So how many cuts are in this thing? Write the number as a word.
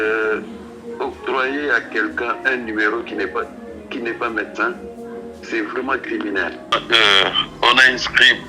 one